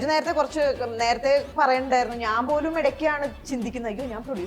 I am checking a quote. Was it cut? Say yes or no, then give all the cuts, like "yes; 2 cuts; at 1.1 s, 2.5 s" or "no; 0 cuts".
no; 0 cuts